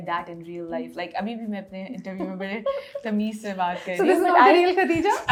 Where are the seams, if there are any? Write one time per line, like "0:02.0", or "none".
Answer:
none